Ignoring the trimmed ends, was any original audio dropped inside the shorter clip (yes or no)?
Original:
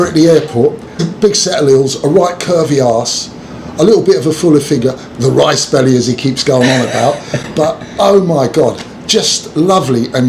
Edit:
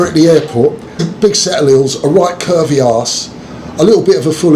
no